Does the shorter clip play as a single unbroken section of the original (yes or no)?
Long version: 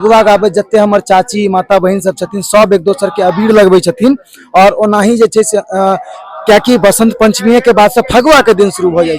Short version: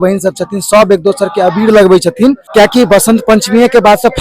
no